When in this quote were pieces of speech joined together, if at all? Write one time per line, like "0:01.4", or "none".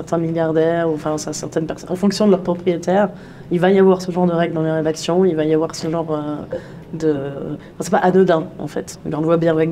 none